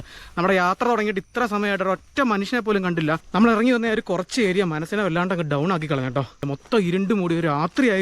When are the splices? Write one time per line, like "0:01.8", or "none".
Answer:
0:03.2
0:06.5